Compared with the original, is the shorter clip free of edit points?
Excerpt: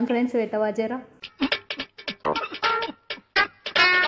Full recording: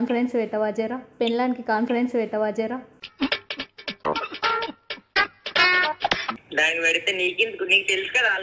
no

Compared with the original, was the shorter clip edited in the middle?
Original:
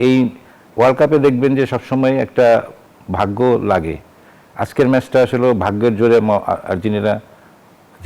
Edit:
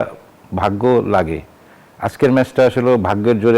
no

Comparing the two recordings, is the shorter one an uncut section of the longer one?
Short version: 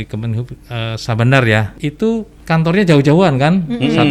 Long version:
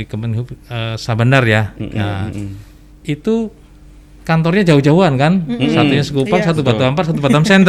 no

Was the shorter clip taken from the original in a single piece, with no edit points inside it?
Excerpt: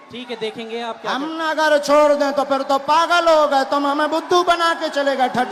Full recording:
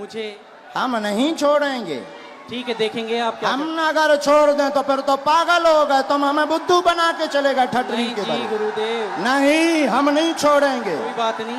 yes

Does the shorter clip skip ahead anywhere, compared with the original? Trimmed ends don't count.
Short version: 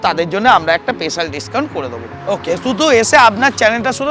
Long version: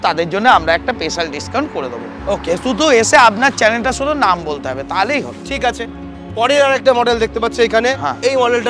no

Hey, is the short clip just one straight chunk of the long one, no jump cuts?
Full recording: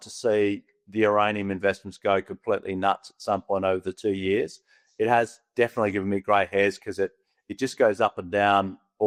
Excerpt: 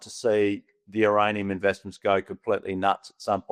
yes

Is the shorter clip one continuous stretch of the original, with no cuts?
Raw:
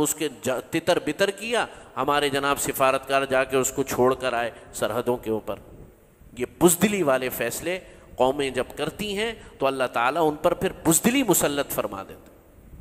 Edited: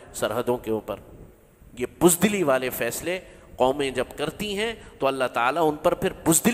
yes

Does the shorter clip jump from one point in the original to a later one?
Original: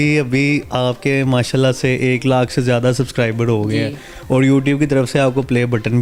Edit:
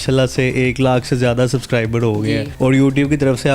yes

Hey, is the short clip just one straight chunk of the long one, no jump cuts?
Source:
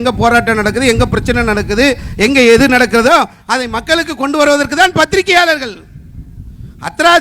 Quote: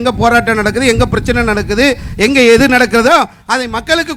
yes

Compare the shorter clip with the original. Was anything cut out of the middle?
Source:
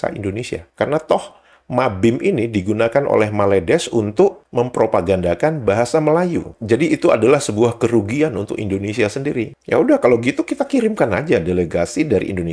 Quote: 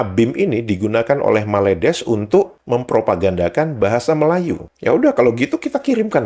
yes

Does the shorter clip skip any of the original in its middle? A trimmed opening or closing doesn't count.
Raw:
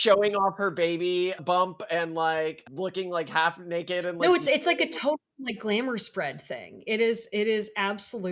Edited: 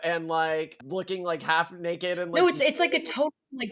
no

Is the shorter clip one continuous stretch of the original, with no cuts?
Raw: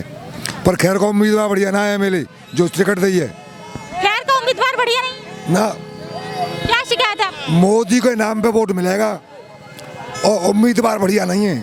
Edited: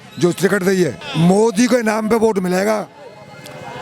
no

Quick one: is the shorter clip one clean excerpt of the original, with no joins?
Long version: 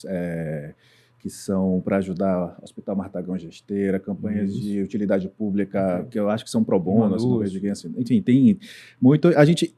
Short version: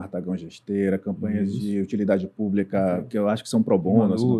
yes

